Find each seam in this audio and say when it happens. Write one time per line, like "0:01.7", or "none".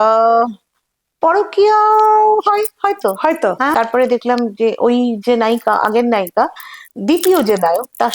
0:03.7

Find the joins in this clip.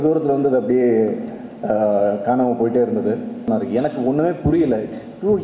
0:03.5

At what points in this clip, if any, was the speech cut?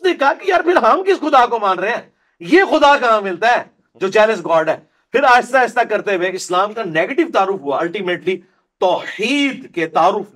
none

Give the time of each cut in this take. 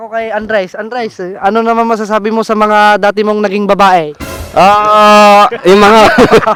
none

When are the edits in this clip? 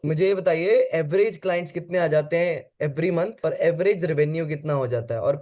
none

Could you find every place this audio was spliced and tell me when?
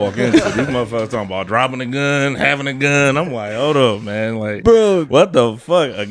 none

